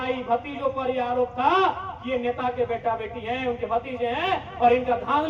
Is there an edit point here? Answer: no; 0 cuts

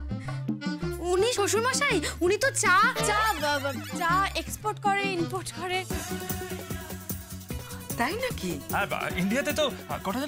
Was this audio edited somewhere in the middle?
yes; 1 cut; at 8.7 s

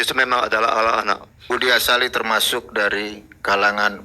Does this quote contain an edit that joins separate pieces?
yes; 1 cut; at 1.5 s

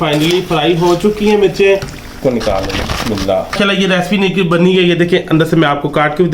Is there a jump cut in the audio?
yes; 2 cuts; at 2.2 s, 3.5 s

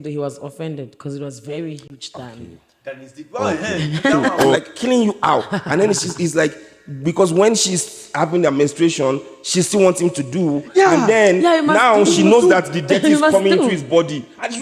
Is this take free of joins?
no; 1 cut; at 4.6 s

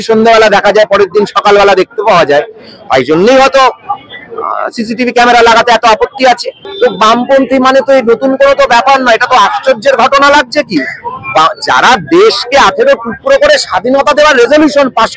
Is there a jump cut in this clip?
no; 0 cuts

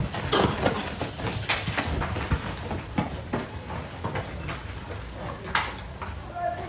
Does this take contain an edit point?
no; 0 cuts

